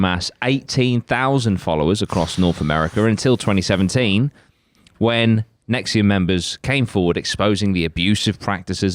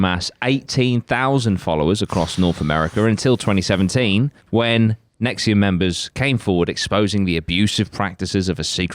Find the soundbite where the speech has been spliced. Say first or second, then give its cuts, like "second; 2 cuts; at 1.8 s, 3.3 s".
second; 1 cut; at 4.4 s